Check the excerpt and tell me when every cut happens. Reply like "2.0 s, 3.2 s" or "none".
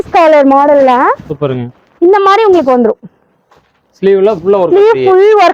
none

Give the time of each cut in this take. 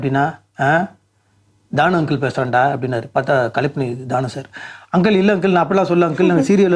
none

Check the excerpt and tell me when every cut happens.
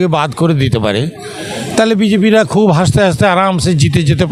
none

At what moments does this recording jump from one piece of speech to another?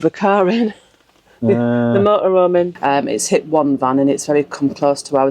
2.8 s

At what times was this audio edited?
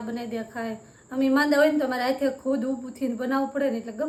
none

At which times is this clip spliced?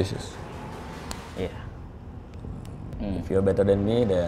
1.2 s, 2.8 s

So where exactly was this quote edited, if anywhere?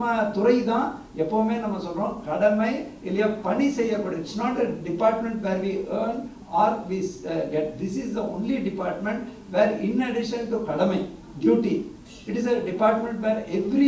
none

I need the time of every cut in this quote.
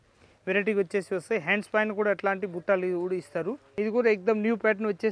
3.6 s

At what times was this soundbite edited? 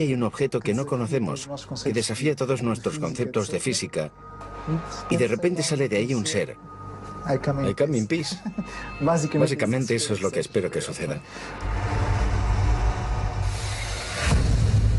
11.2 s

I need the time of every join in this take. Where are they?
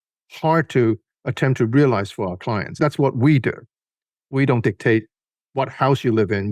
2.8 s

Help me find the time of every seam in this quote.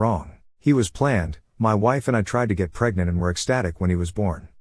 none

